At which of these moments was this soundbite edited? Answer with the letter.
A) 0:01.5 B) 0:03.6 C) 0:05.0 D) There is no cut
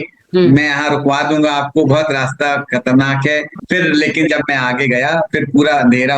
B